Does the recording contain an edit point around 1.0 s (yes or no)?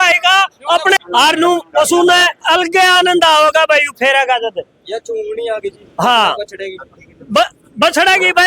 yes